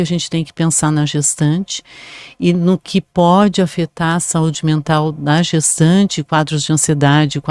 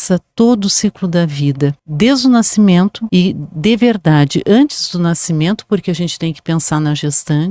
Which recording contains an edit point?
second; 2 cuts; at 1.8 s, 3.0 s

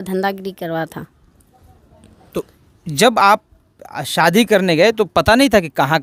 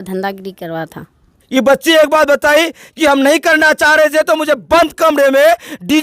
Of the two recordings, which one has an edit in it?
second; 1 cut; at 1.4 s

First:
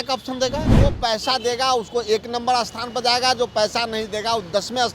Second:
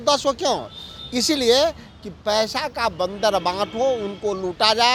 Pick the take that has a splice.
first; 1 cut; at 0.9 s

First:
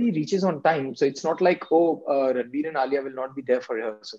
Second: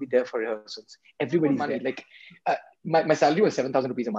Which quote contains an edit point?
second; 1 cut; at 1.8 s

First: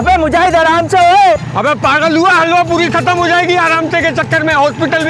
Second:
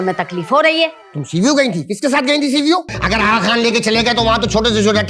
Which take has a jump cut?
second; 1 cut; at 3.0 s

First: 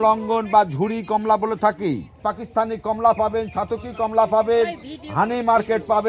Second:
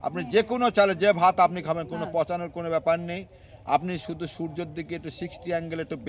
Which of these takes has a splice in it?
first; 1 cut; at 2.2 s

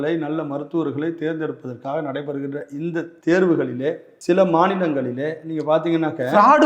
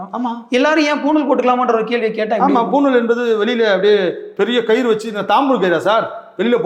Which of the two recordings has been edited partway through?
first; 2 cuts; at 3.1 s, 4.1 s

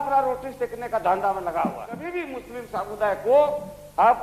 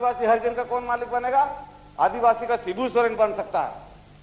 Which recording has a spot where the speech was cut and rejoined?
first; 1 cut; at 2.1 s

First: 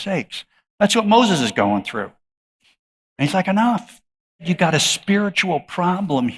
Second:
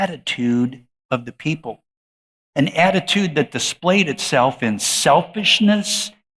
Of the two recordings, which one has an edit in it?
first; 1 cut; at 4.4 s

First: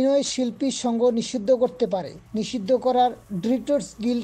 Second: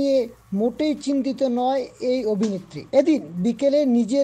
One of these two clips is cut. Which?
second; 1 cut; at 2.7 s

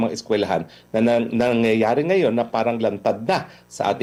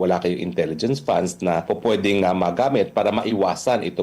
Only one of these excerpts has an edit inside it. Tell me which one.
second; 1 cut; at 1.6 s

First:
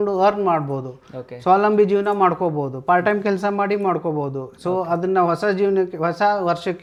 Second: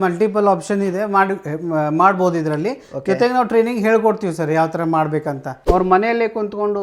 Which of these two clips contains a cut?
second; 1 cut; at 5.5 s

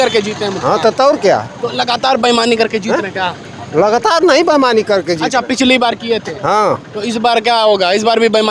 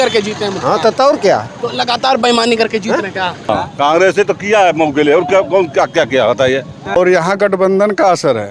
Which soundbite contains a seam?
second; 2 cuts; at 3.5 s, 7.0 s

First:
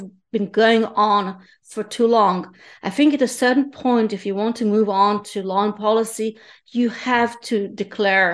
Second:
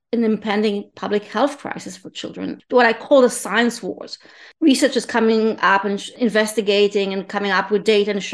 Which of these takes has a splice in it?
second; 3 cuts; at 2.6 s, 4.8 s, 6.1 s

